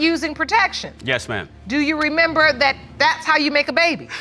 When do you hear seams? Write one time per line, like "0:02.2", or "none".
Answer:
none